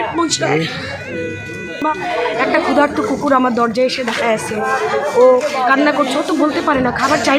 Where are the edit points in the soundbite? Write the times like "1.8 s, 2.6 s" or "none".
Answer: 1.8 s